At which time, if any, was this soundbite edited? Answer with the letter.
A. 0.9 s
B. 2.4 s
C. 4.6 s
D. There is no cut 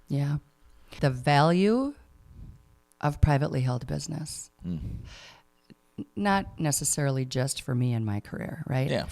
A